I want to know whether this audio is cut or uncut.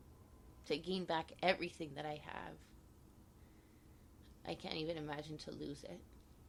uncut